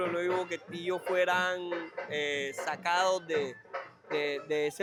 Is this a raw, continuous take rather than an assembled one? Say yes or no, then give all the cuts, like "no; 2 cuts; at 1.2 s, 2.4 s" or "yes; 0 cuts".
yes; 0 cuts